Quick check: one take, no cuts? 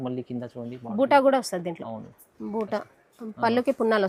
yes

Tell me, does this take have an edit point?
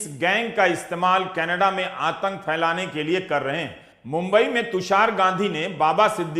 no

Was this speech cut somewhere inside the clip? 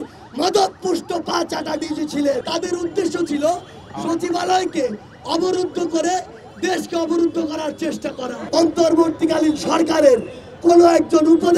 yes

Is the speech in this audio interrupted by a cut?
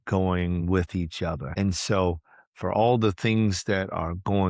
yes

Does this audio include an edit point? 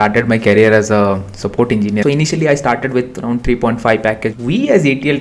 yes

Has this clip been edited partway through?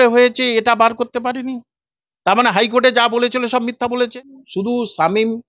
yes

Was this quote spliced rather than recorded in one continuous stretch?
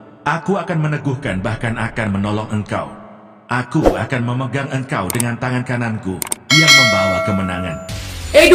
no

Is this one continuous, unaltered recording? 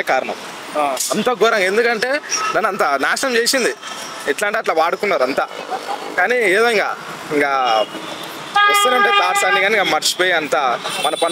yes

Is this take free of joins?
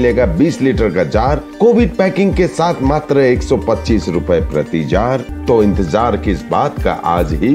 no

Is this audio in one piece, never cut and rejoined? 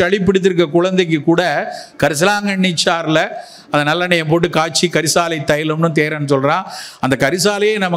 yes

